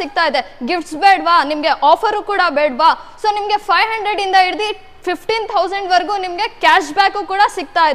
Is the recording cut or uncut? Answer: uncut